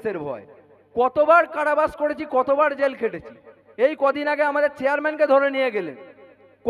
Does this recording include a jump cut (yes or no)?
no